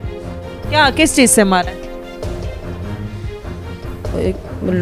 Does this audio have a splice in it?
yes; 2 cuts; at 2.2 s, 3.7 s

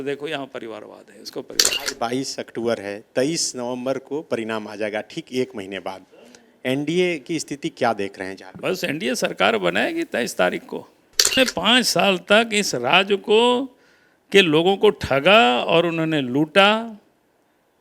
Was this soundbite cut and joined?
yes; 2 cuts; at 1.8 s, 11.4 s

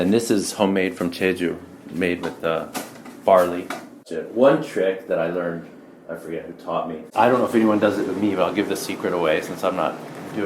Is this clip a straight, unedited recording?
no; 2 cuts; at 4.0 s, 7.1 s

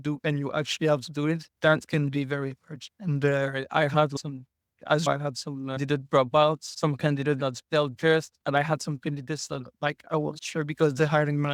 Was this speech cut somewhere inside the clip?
no; 0 cuts

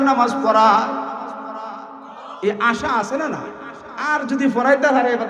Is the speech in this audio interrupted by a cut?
yes; 1 cut; at 4.1 s

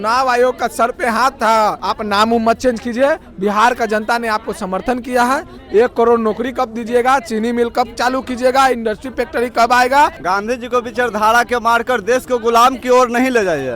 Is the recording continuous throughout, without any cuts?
no; 2 cuts; at 1.8 s, 10.2 s

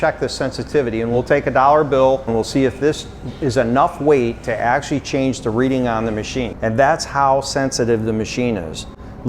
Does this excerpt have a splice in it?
yes; 3 cuts; at 1.1 s, 2.3 s, 6.5 s

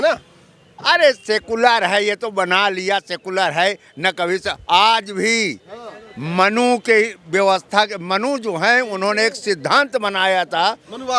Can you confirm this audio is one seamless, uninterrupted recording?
yes; 0 cuts

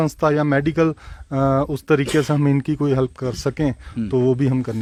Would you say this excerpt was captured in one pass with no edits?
yes; 0 cuts

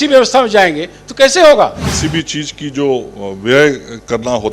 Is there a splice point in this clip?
yes; 1 cut; at 1.8 s

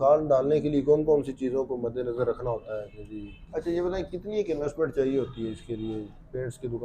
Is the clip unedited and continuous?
no; 1 cut; at 3.4 s

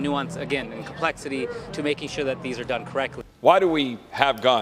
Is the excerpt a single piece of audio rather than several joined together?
no; 1 cut; at 3.2 s

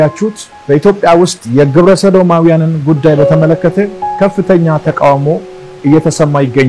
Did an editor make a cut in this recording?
no; 0 cuts

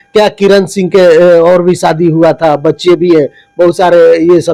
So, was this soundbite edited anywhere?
no; 0 cuts

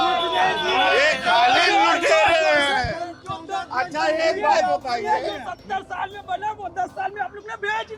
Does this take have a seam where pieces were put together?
no; 0 cuts

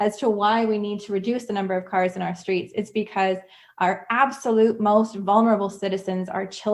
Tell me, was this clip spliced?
no; 0 cuts

